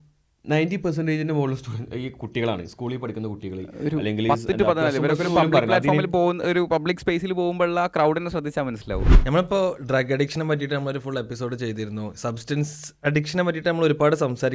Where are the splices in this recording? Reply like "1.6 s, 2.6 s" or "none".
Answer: 9.1 s